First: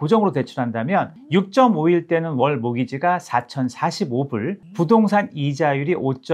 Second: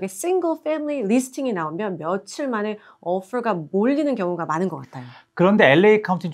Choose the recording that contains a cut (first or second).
first